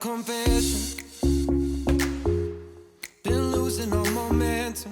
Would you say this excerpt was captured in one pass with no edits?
yes; 0 cuts

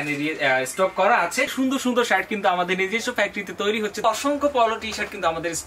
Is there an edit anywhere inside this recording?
yes; 2 cuts; at 1.5 s, 4.0 s

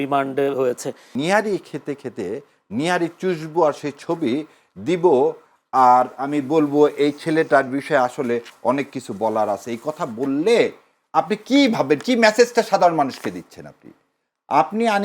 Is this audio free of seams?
no; 1 cut; at 1.1 s

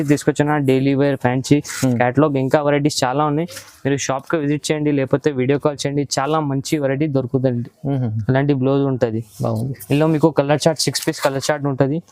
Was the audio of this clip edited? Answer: no; 0 cuts

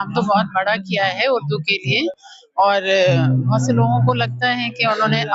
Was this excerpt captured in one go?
yes; 0 cuts

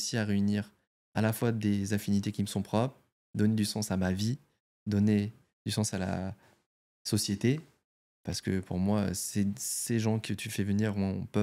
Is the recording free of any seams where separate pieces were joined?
yes; 0 cuts

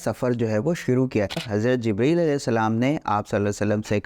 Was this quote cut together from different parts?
yes; 1 cut; at 1.4 s

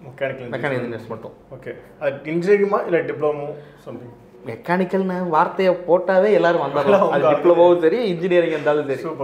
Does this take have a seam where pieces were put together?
no; 0 cuts

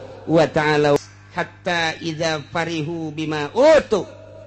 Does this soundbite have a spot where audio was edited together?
yes; 1 cut; at 1.0 s

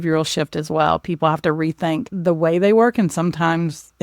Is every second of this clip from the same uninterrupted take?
no; 1 cut; at 2.1 s

